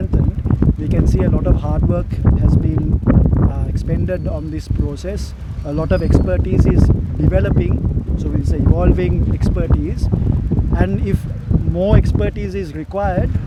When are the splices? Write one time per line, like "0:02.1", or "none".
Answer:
none